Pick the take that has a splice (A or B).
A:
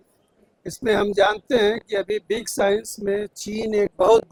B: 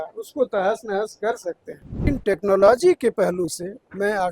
B